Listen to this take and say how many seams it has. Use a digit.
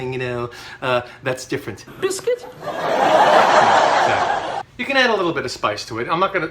1